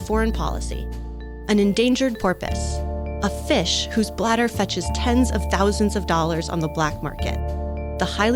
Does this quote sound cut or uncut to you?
uncut